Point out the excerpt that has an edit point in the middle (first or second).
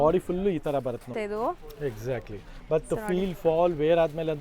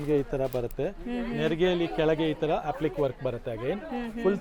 first